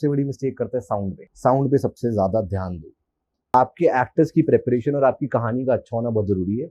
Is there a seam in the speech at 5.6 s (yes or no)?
no